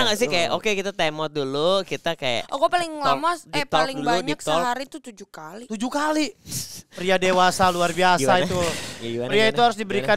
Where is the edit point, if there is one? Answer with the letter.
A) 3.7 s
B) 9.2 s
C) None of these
C